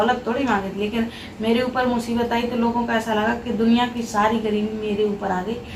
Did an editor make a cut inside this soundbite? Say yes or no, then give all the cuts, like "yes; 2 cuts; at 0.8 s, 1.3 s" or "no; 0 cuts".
no; 0 cuts